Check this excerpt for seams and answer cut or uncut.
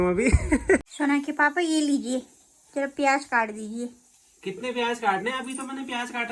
cut